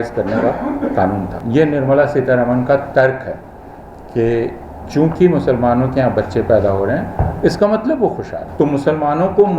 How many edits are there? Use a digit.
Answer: 2